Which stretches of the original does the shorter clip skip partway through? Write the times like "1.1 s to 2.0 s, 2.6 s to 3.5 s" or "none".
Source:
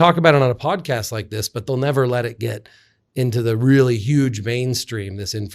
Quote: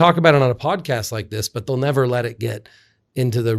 none